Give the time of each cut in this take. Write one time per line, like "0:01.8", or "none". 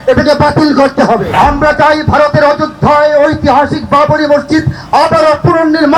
0:01.3